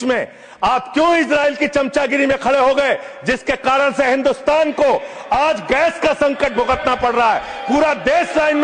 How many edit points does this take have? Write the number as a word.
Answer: zero